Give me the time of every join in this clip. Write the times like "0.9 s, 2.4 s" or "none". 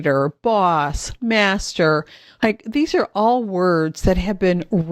none